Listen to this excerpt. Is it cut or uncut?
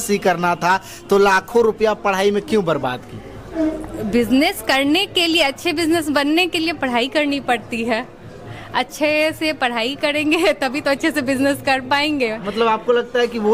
uncut